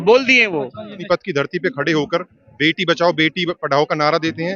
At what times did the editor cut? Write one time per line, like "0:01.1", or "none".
0:01.0